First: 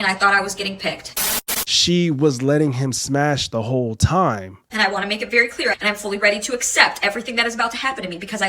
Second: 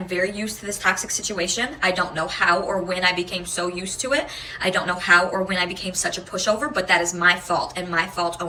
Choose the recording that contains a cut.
first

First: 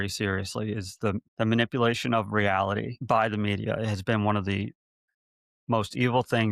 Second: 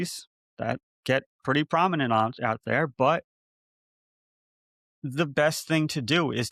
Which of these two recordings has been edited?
first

